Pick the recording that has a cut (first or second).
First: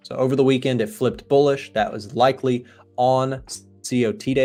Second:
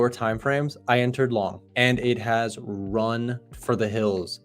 second